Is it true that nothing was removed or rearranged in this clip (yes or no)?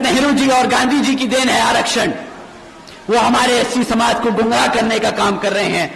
yes